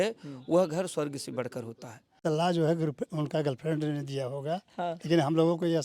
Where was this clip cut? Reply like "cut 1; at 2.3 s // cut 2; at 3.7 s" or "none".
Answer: cut 1; at 2.2 s